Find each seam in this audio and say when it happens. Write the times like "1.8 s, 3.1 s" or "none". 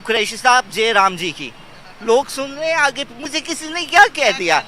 none